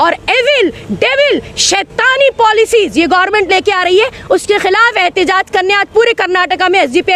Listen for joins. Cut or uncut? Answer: uncut